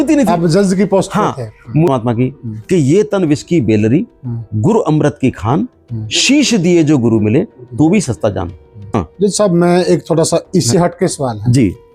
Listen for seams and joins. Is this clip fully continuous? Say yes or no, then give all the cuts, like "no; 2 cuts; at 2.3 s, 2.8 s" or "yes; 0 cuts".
no; 2 cuts; at 1.9 s, 8.8 s